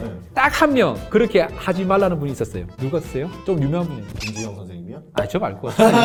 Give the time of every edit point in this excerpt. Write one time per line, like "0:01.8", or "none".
none